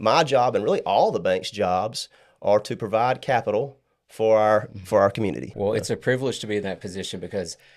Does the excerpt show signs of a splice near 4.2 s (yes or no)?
no